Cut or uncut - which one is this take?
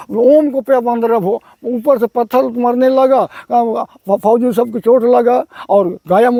uncut